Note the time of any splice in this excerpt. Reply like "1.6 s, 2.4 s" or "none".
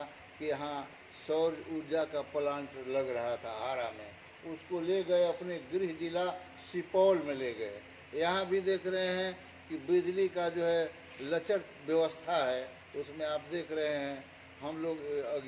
none